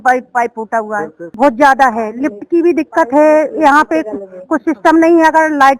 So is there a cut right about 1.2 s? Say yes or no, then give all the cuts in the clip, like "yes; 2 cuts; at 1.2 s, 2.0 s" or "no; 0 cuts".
yes; 1 cut; at 1.2 s